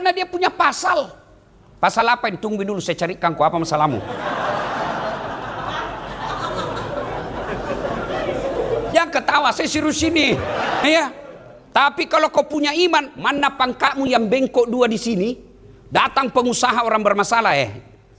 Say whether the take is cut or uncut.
cut